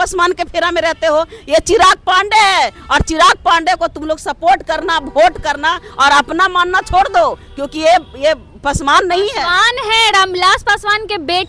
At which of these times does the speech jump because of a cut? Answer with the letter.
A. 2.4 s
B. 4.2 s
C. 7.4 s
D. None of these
D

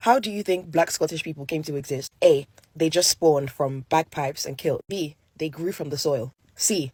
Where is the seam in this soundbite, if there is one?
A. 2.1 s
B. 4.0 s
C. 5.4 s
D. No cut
D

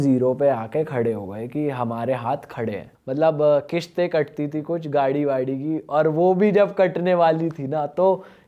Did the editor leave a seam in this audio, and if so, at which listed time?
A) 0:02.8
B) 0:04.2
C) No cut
A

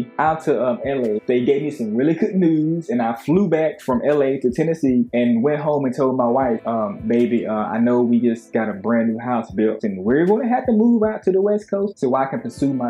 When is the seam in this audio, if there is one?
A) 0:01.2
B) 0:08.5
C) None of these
A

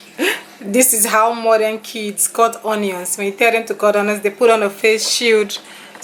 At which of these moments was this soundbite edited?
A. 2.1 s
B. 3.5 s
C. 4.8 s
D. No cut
D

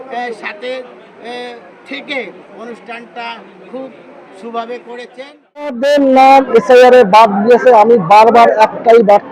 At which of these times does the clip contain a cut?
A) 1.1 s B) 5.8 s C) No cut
B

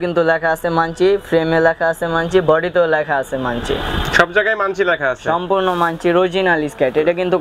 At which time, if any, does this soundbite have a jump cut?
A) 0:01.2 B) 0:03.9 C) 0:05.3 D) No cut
D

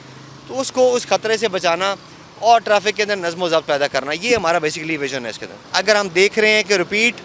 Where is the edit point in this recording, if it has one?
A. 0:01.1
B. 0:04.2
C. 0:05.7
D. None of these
C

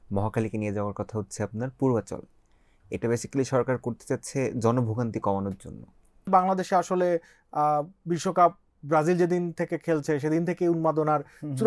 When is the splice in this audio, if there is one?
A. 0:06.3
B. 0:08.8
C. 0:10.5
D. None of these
A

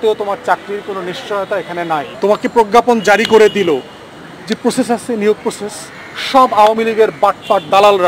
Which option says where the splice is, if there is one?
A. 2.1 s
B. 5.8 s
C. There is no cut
A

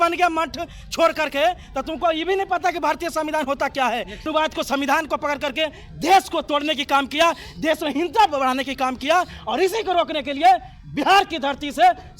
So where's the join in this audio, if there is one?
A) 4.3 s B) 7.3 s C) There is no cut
A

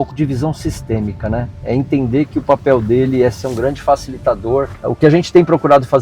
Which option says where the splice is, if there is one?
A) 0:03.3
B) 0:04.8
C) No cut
B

